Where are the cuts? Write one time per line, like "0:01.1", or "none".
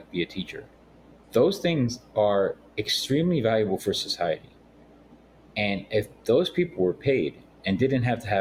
none